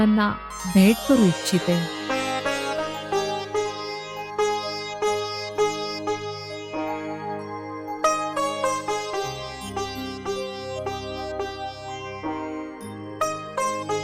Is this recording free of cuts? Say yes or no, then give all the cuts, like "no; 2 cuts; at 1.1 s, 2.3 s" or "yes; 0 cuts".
yes; 0 cuts